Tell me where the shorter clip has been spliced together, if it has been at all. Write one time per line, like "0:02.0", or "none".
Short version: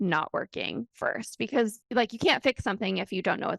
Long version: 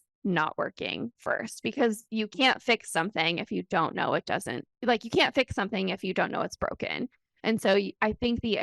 0:01.8